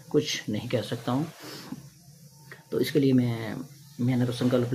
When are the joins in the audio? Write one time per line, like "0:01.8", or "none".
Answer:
none